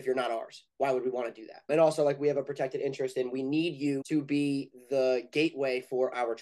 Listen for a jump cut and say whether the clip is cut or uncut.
cut